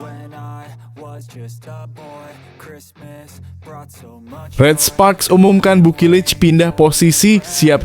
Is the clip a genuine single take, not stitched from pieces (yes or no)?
no